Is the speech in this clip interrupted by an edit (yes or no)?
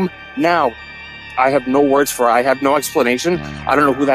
yes